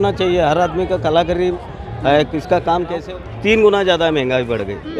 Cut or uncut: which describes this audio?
cut